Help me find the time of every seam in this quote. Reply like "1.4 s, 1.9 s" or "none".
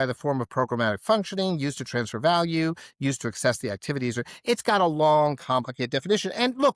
none